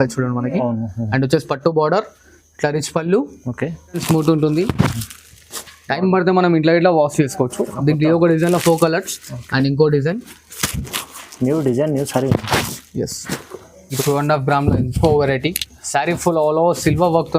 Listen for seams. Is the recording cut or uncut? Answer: cut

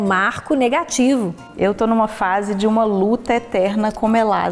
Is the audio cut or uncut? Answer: cut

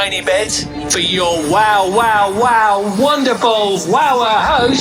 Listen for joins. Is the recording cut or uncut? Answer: uncut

